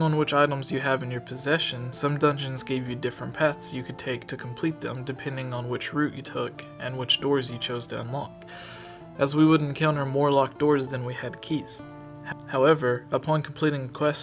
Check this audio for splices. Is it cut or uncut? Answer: cut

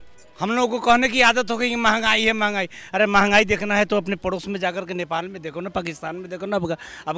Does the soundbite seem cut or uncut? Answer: uncut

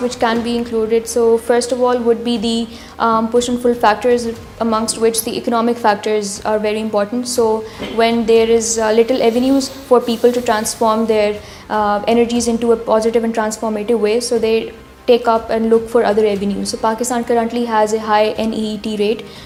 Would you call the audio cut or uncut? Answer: uncut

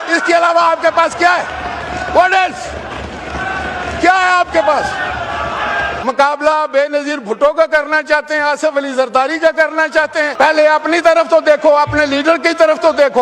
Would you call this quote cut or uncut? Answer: cut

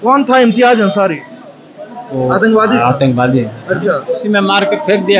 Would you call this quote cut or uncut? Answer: cut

